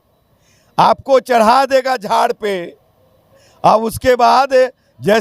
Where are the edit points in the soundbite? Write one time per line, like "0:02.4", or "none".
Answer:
none